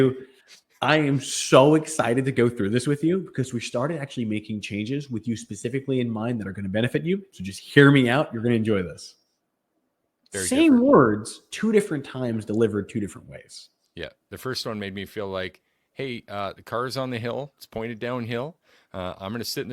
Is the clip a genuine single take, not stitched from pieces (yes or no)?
yes